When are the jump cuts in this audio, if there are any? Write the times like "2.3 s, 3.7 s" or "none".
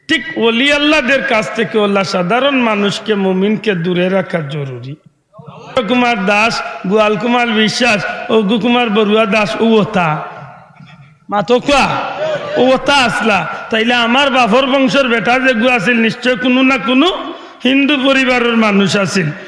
5.7 s

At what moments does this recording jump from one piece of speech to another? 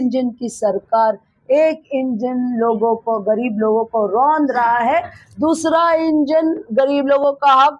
none

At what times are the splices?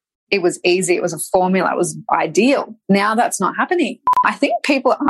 2.7 s, 4.2 s

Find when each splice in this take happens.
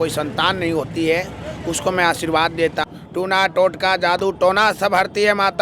2.9 s

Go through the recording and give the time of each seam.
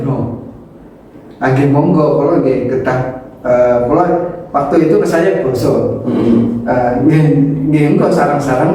none

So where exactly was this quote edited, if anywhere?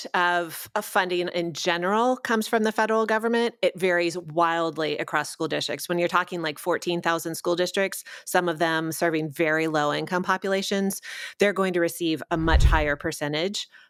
none

